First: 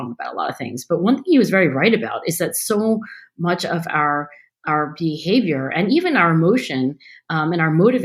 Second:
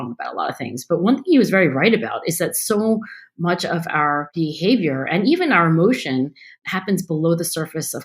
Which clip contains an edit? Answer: second; 2 cuts; at 4.3 s, 6.5 s

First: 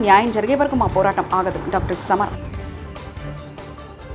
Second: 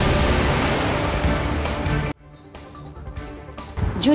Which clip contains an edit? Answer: second; 1 cut; at 2.2 s

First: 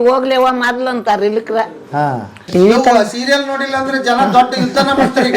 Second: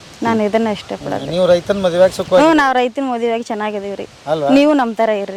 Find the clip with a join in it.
first; 1 cut; at 2.3 s

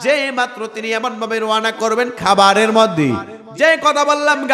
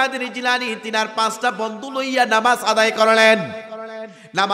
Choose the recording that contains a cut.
first; 1 cut; at 3.4 s

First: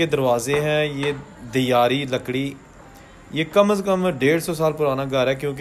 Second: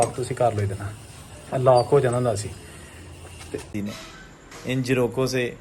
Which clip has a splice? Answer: second; 1 cut; at 3.7 s

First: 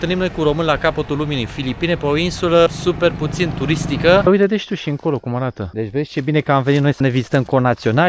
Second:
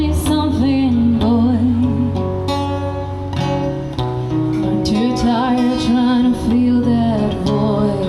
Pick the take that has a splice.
first; 4 cuts; at 2.8 s, 4.3 s, 5.6 s, 7.0 s

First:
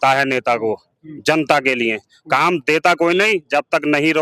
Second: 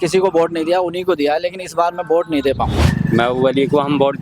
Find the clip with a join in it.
second; 1 cut; at 2.8 s

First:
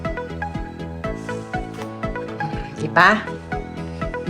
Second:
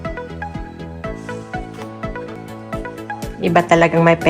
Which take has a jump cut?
second; 1 cut; at 2.4 s

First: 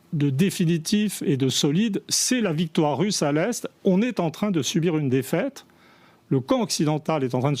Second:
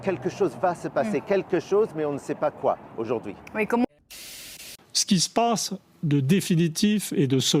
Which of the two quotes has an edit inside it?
second; 1 cut; at 4.0 s

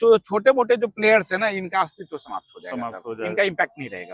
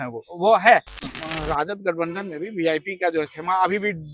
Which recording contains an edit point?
second; 1 cut; at 1.0 s

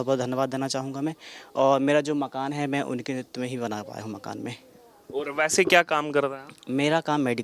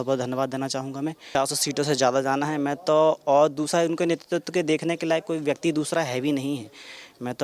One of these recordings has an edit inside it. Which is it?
second; 1 cut; at 1.3 s

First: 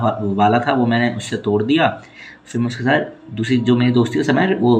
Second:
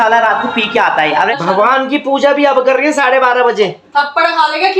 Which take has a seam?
second; 1 cut; at 1.4 s

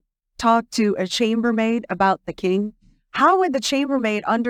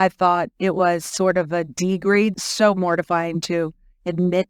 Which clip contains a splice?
second; 1 cut; at 2.4 s

